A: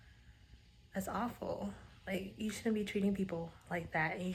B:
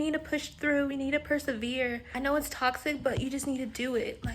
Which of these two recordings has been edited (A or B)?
B